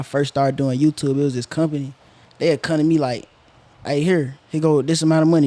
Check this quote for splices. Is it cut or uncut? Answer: uncut